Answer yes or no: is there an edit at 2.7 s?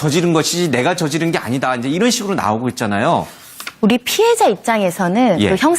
no